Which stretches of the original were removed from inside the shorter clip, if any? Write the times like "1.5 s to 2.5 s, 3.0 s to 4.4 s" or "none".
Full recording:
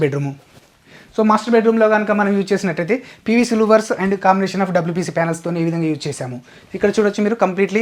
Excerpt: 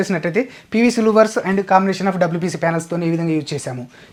none